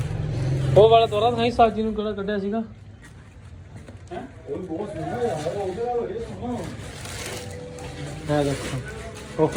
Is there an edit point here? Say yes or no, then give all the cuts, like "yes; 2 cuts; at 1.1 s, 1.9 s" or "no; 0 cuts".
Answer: no; 0 cuts